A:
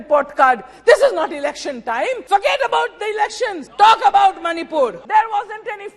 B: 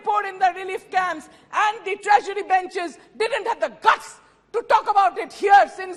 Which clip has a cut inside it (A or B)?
A